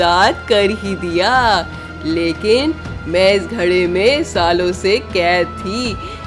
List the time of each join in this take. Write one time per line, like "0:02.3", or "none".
none